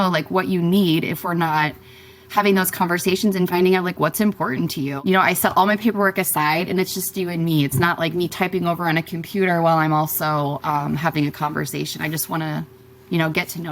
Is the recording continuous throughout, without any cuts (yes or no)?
no